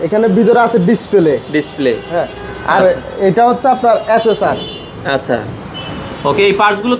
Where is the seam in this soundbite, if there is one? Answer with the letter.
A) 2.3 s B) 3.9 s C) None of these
C